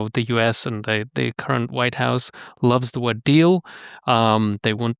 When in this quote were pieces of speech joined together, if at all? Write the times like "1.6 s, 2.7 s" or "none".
none